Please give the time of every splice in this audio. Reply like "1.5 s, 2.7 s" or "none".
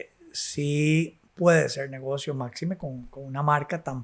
none